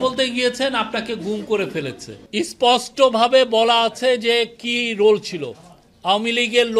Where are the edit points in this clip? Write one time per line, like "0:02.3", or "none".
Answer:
0:02.1